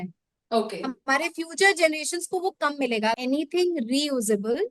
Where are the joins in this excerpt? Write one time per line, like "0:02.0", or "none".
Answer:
0:03.2